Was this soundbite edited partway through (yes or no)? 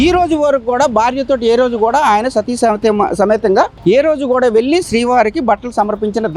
no